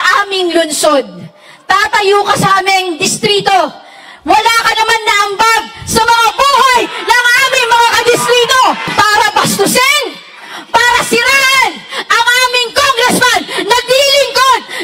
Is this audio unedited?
no; 1 cut; at 8.9 s

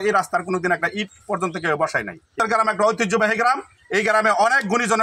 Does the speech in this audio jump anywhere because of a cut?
yes; 1 cut; at 2.4 s

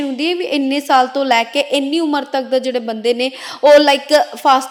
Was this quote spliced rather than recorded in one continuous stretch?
no; 0 cuts

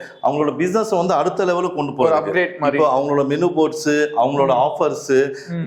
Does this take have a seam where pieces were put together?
no; 0 cuts

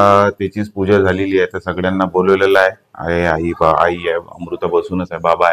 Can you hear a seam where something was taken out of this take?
no; 0 cuts

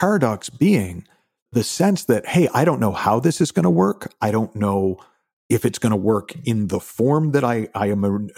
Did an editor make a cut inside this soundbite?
yes; 1 cut; at 1.5 s

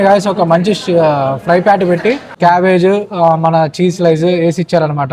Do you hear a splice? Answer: no; 0 cuts

